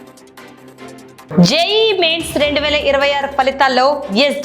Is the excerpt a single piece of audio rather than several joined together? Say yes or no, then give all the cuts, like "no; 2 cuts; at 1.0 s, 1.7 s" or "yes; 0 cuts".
no; 1 cut; at 1.3 s